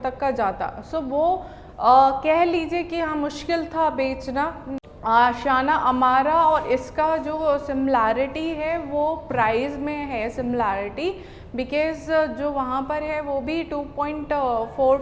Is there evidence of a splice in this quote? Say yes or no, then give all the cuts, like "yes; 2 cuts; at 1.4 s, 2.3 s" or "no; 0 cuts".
yes; 1 cut; at 4.7 s